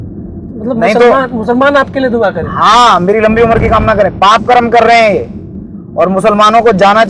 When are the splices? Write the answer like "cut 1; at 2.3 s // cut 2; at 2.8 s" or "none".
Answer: none